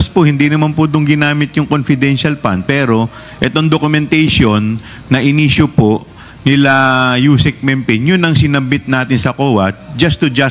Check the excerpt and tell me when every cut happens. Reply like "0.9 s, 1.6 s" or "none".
none